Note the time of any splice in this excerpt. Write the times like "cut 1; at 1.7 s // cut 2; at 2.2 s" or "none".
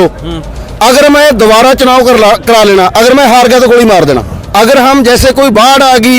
cut 1; at 4.4 s